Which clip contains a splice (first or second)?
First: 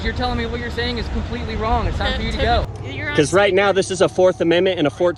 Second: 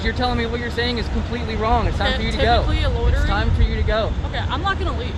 first